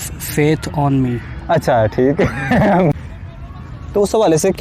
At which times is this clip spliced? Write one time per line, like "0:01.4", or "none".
0:02.9